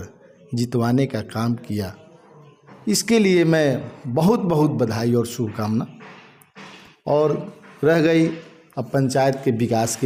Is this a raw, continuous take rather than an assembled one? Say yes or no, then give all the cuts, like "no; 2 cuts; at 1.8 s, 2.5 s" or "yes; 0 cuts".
yes; 0 cuts